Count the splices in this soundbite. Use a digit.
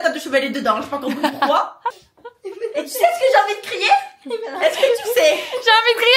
1